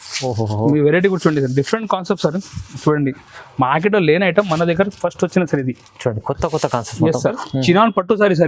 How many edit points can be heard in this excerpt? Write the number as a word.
one